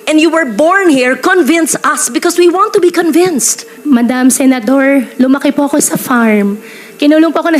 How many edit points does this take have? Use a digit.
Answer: 1